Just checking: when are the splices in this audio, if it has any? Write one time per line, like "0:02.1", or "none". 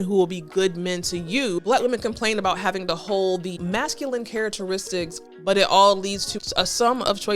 0:01.6
0:03.6
0:05.2
0:06.3